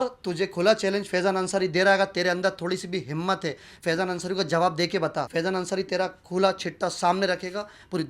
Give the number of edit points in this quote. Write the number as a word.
one